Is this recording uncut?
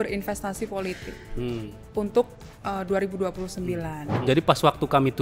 no; 1 cut; at 4.2 s

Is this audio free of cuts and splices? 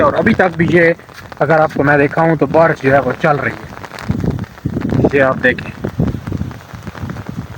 yes; 0 cuts

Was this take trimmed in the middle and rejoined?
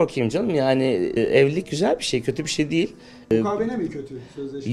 yes; 2 cuts; at 1.2 s, 3.3 s

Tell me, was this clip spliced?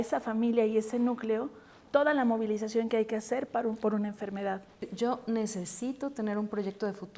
yes; 1 cut; at 4.9 s

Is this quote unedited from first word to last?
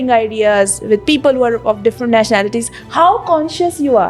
yes; 0 cuts

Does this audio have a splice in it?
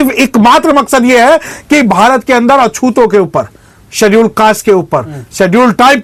no; 0 cuts

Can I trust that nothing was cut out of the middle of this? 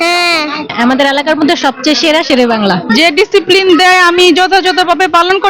no; 1 cut; at 2.8 s

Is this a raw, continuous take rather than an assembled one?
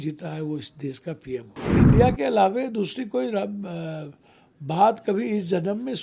no; 1 cut; at 1.8 s

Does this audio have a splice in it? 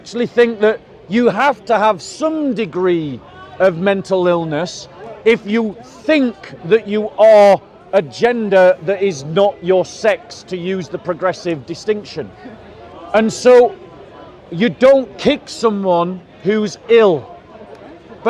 no; 0 cuts

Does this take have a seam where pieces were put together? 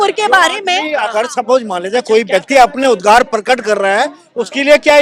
no; 0 cuts

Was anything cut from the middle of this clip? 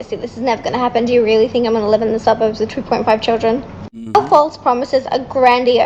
no; 0 cuts

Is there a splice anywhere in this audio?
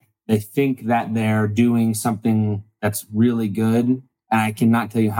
no; 0 cuts

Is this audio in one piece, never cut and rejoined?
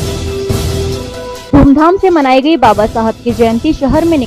no; 1 cut; at 1.4 s

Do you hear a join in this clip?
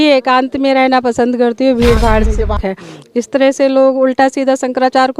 yes; 1 cut; at 2.6 s

